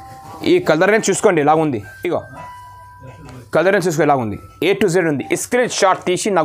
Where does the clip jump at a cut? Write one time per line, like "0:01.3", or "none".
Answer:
none

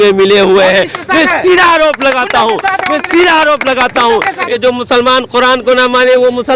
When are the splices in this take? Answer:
0:04.4

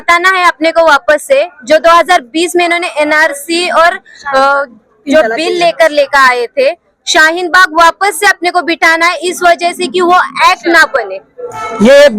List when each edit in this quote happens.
none

